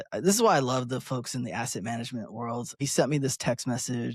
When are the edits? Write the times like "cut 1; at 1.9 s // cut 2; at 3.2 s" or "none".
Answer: cut 1; at 2.8 s